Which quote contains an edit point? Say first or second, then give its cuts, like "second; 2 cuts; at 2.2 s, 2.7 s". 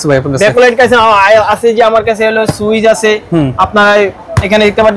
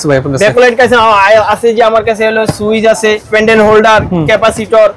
second; 1 cut; at 3.2 s